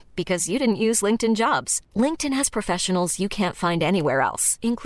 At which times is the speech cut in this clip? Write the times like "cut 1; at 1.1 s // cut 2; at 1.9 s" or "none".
none